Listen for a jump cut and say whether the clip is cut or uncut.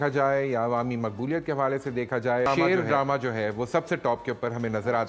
cut